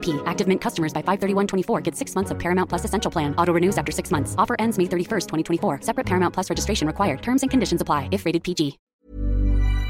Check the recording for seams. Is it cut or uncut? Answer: cut